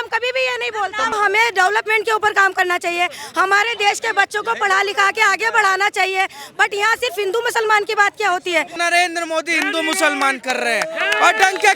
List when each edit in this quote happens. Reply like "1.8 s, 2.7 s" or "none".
1.1 s, 8.8 s